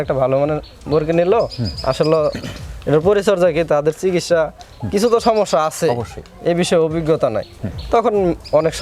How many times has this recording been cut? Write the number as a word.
zero